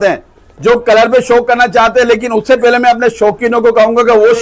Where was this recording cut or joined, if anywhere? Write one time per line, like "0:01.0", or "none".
none